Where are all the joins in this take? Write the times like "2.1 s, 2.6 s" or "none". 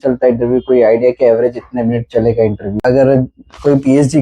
2.8 s